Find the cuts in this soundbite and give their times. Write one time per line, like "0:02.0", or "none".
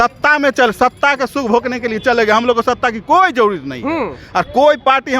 none